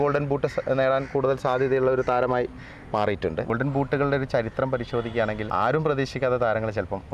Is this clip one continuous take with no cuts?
no; 2 cuts; at 3.5 s, 5.4 s

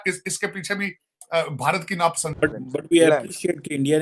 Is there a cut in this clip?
yes; 1 cut; at 2.4 s

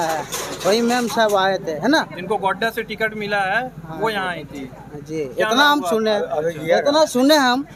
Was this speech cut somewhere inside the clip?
no; 0 cuts

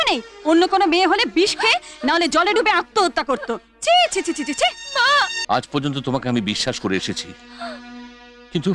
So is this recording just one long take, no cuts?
no; 1 cut; at 5.4 s

